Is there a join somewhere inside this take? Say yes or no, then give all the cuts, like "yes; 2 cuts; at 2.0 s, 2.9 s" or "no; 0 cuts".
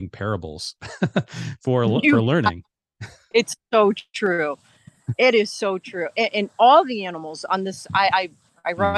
no; 0 cuts